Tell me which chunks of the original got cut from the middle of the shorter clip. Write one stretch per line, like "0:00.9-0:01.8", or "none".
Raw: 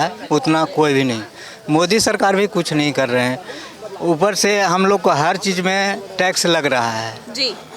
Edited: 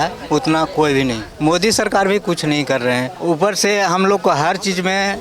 0:01.3-0:01.5
0:03.4-0:03.9